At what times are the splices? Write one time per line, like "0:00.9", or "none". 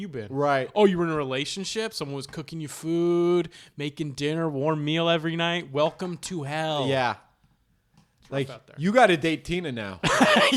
none